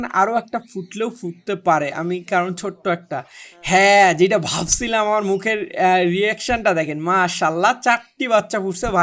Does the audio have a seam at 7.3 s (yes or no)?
no